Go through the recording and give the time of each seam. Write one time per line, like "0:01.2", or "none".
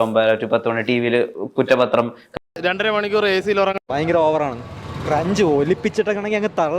0:02.2